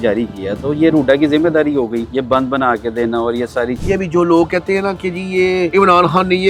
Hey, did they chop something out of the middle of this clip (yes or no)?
yes